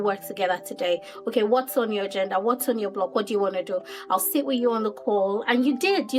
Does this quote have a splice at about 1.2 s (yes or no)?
no